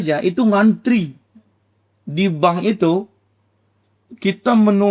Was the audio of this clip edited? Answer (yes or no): no